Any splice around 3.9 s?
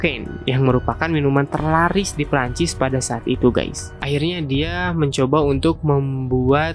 yes; 1 cut; at 3.9 s

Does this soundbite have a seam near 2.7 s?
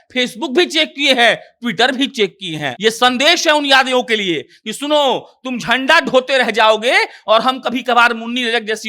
yes; 1 cut; at 2.7 s

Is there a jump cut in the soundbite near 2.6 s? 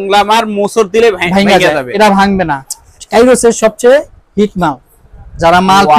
yes; 1 cut; at 2.6 s

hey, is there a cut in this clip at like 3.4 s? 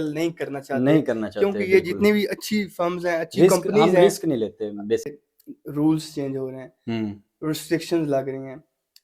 no; 1 cut; at 5.2 s

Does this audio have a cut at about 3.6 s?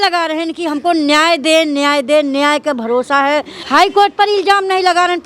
yes; 1 cut; at 3.6 s

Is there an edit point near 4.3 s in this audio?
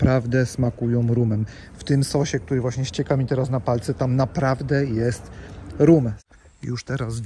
no; 1 cut; at 6.1 s

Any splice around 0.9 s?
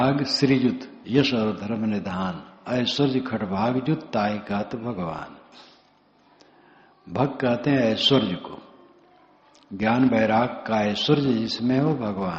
yes; 1 cut; at 0.9 s

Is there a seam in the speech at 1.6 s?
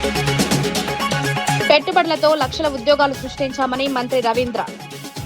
yes; 1 cut; at 1.6 s

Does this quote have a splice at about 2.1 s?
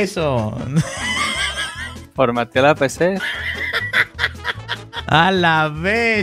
no; 1 cut; at 5.0 s

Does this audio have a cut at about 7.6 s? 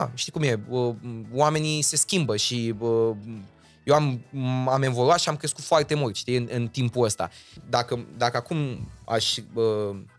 yes; 1 cut; at 7.6 s

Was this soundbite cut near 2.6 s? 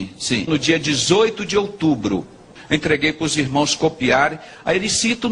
yes; 1 cut; at 2.6 s

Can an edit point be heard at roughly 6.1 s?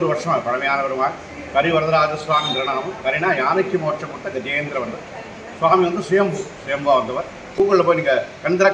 no; 1 cut; at 7.5 s

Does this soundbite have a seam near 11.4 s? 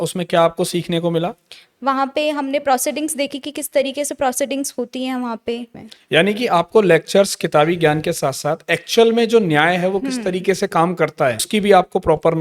yes; 2 cuts; at 5.8 s, 11.4 s

